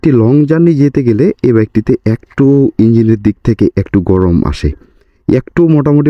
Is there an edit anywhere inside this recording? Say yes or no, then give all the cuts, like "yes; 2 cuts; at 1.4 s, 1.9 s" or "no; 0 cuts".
no; 0 cuts